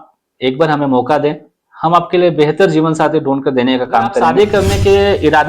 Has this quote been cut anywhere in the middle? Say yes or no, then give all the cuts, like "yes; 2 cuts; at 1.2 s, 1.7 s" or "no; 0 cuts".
yes; 1 cut; at 4.2 s